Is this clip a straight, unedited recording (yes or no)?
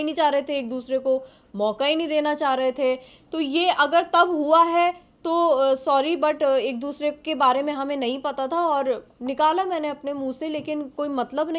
yes